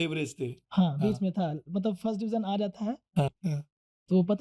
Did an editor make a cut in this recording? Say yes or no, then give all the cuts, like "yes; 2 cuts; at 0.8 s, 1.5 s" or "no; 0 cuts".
yes; 1 cut; at 3.3 s